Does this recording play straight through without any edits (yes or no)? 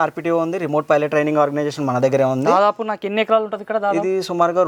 yes